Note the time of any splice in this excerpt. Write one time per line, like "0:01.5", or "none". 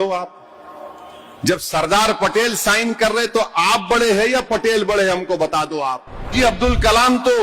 0:06.2